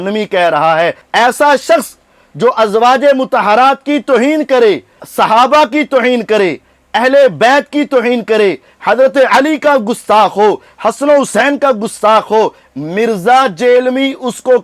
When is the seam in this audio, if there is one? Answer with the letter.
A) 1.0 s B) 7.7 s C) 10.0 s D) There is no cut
A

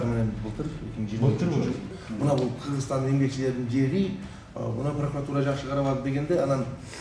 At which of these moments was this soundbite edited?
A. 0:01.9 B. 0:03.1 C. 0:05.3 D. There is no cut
A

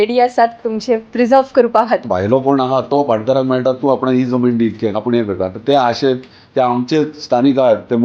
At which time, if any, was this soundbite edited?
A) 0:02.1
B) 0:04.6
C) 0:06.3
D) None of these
A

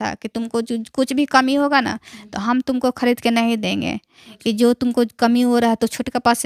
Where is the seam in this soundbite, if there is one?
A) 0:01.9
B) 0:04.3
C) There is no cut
C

